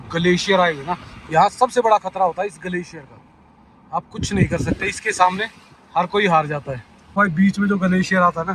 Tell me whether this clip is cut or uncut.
cut